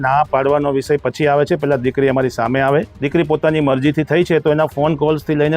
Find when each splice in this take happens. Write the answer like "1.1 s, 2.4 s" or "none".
3.0 s